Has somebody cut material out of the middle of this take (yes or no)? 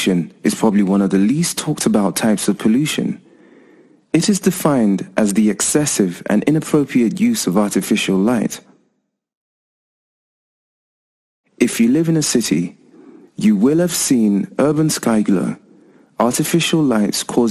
no